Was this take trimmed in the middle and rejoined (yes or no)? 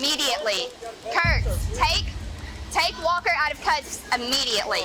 no